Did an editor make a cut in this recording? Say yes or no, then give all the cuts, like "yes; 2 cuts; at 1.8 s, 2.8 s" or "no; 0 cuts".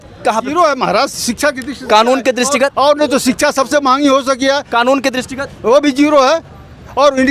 no; 0 cuts